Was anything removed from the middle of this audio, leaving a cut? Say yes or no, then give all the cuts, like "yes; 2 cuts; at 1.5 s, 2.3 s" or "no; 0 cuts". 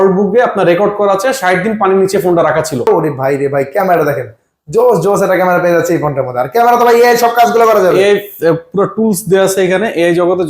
yes; 1 cut; at 2.9 s